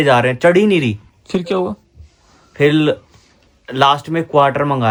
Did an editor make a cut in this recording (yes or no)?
no